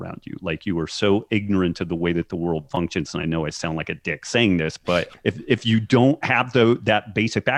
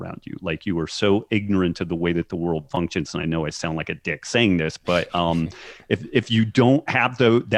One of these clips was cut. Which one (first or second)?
first